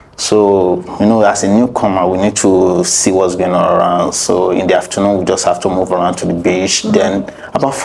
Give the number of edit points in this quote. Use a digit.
0